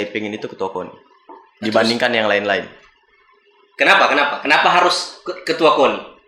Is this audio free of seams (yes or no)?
yes